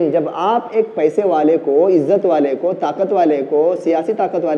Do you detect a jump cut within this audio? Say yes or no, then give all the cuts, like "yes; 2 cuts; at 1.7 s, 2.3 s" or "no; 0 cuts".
no; 0 cuts